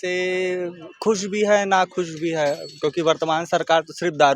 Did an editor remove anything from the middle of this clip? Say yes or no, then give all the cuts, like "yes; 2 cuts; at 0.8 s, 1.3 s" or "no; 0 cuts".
no; 0 cuts